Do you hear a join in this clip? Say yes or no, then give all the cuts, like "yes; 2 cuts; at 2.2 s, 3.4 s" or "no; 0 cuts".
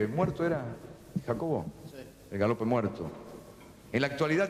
yes; 1 cut; at 1.8 s